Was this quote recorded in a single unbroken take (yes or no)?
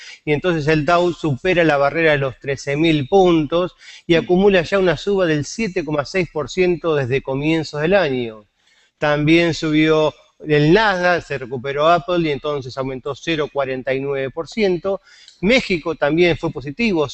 no